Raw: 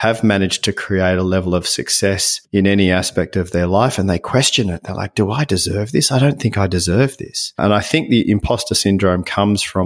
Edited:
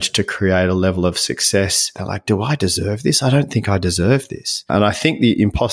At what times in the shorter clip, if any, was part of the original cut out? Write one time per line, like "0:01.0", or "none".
0:01.9